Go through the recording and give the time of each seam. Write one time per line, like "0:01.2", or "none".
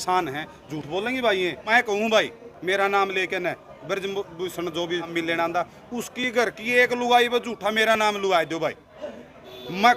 0:01.7
0:05.1